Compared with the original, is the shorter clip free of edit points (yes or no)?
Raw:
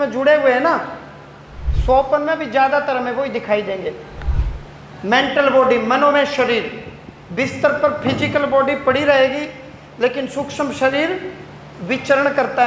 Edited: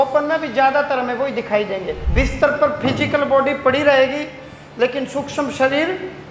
no